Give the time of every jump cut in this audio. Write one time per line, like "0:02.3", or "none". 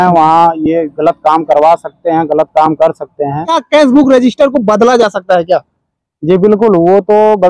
0:03.6